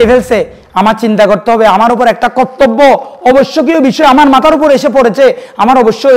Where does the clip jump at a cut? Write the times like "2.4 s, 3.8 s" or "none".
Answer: none